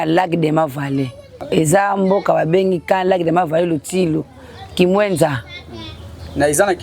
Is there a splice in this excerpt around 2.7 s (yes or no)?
no